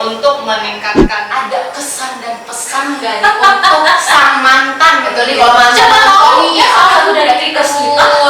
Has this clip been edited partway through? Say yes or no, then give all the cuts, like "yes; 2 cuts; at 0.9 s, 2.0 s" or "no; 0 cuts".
yes; 1 cut; at 1.1 s